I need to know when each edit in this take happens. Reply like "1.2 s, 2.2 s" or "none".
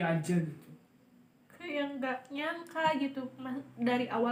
none